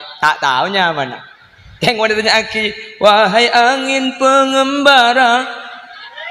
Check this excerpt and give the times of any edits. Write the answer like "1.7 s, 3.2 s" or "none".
none